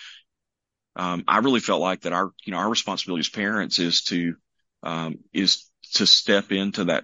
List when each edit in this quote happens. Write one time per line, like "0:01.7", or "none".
none